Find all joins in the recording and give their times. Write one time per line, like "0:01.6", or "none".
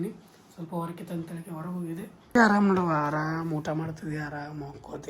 0:02.3